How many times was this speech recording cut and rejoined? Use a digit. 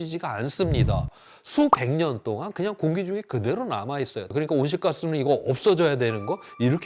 1